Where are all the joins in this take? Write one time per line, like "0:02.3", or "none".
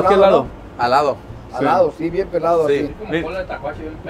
none

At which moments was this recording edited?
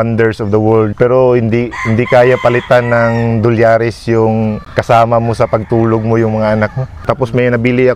0:00.9
0:04.7
0:07.0

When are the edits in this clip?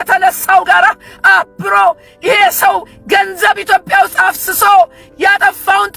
none

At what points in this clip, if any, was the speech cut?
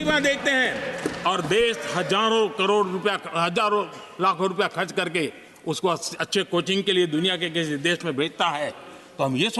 none

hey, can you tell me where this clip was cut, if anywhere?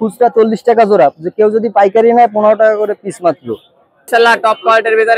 0:04.1

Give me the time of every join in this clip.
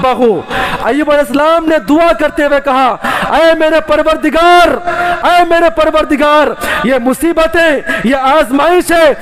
none

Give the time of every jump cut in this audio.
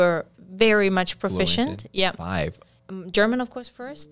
0:02.7

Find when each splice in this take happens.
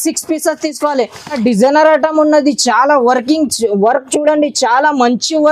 0:01.4

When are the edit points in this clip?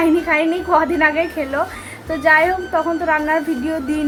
none

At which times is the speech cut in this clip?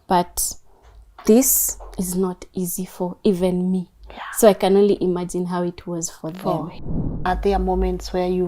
0:07.2

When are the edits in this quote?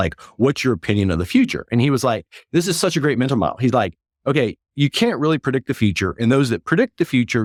none

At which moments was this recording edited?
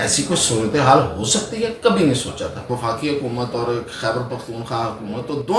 0:02.7

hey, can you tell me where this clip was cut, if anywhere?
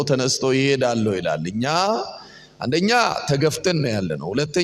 none

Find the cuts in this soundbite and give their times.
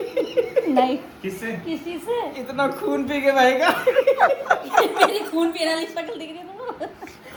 none

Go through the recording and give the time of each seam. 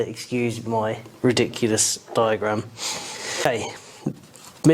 0:03.5

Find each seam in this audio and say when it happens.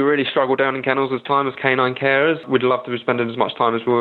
0:02.4

